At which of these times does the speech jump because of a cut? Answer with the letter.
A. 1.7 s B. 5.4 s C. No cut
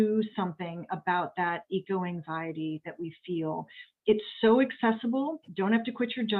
B